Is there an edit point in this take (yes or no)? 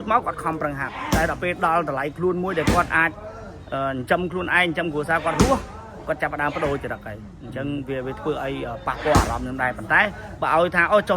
no